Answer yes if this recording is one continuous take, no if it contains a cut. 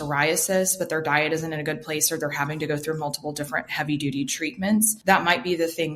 no